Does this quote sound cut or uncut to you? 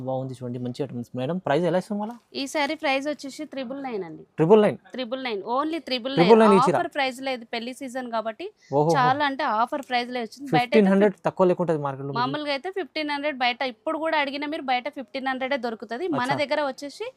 uncut